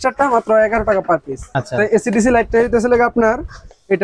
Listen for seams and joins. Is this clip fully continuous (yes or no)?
no